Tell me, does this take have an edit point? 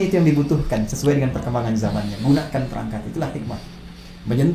no; 0 cuts

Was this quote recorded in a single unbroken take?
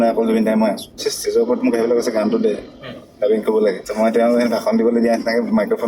no; 2 cuts; at 1.1 s, 3.8 s

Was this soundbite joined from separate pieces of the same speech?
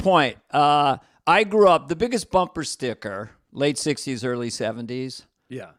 no; 0 cuts

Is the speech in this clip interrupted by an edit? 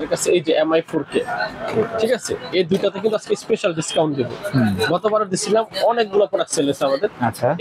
no; 0 cuts

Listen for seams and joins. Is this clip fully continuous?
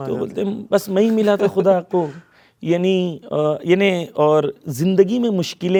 yes; 0 cuts

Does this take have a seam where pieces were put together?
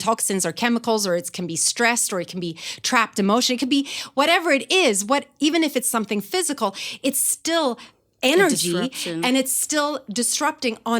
no; 0 cuts

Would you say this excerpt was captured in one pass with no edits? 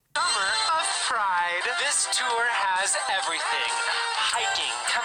yes; 0 cuts

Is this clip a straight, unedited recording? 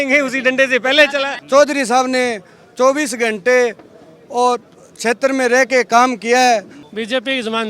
no; 2 cuts; at 1.4 s, 6.8 s

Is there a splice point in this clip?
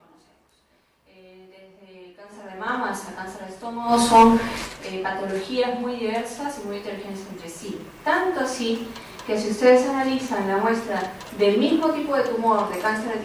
yes; 1 cut; at 11.0 s

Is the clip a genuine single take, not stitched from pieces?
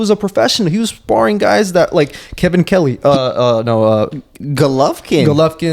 yes; 0 cuts

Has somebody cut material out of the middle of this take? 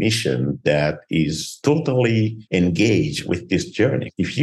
yes; 3 cuts; at 1.5 s, 2.4 s, 3.6 s

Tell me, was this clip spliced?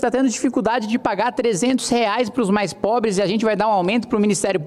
no; 0 cuts

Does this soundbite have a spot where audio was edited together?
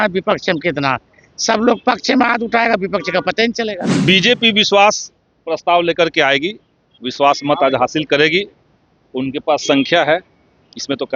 yes; 1 cut; at 3.9 s

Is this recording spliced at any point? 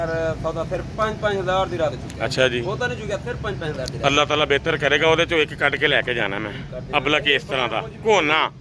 no; 0 cuts

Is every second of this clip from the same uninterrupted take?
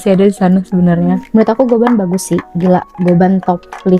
no; 1 cut; at 1.2 s

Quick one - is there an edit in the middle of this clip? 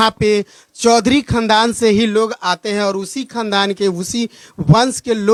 no; 0 cuts

